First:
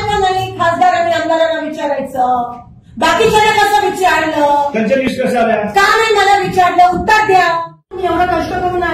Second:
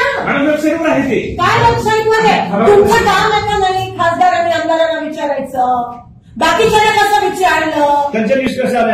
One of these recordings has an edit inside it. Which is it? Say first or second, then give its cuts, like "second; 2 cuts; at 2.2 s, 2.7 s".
first; 1 cut; at 8.0 s